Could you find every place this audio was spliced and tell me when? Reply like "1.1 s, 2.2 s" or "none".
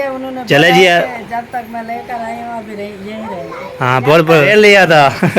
4.5 s